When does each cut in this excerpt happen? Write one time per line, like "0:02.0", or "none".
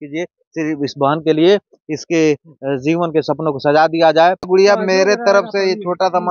0:04.5